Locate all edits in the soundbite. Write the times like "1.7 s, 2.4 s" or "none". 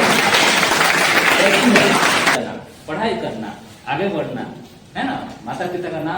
2.3 s